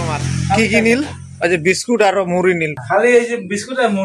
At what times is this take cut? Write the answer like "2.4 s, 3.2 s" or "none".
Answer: 2.8 s